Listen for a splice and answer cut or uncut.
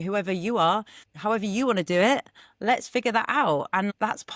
uncut